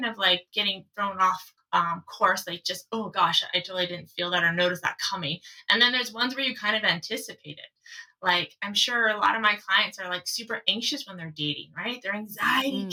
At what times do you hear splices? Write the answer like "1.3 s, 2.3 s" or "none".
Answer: none